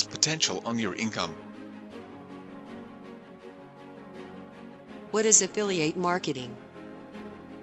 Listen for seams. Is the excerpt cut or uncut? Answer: cut